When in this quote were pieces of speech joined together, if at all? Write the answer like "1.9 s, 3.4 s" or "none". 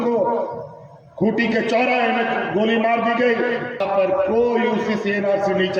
3.8 s